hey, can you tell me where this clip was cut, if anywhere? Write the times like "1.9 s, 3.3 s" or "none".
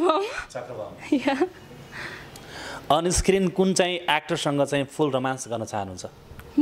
none

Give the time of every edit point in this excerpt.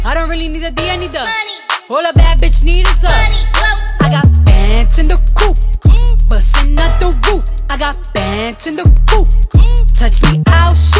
none

